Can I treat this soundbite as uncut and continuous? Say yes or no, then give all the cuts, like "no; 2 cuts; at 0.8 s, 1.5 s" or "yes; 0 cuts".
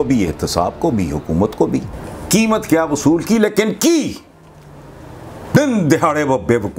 no; 1 cut; at 1.9 s